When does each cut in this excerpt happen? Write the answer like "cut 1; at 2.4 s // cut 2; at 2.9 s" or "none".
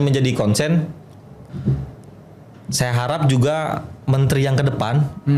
none